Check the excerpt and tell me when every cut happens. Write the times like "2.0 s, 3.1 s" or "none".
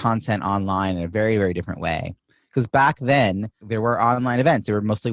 3.6 s